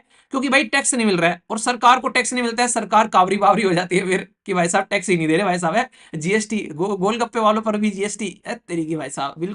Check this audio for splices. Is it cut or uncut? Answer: uncut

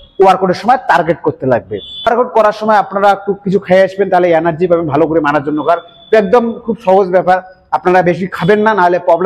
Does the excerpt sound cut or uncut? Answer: cut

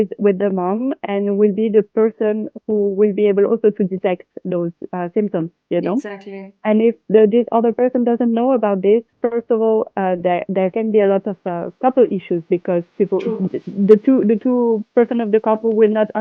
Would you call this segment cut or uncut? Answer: uncut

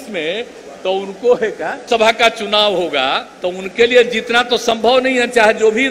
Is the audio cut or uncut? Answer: cut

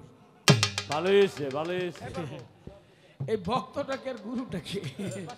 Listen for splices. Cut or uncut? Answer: cut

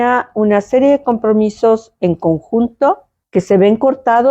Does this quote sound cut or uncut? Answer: cut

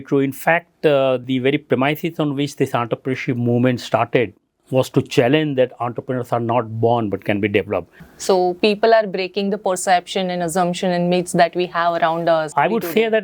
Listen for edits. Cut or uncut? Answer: cut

